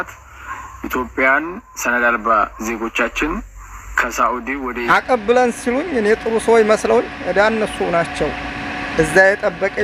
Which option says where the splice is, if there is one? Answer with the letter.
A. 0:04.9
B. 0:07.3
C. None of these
A